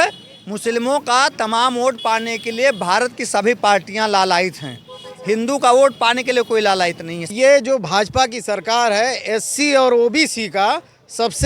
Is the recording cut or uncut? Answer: cut